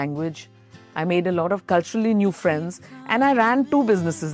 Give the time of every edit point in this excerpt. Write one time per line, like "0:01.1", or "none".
0:01.6